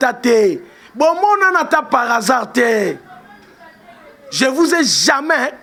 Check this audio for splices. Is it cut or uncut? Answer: uncut